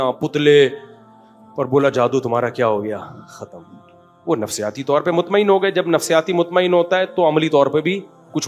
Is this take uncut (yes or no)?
yes